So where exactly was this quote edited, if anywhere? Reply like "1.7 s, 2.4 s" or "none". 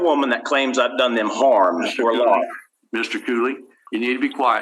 3.7 s